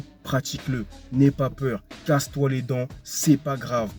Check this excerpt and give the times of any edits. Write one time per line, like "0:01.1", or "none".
none